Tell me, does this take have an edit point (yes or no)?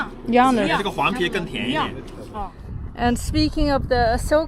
yes